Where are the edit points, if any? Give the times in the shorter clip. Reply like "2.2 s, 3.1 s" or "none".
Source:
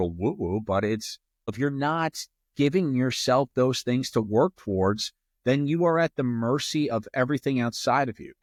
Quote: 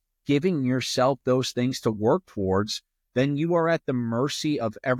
none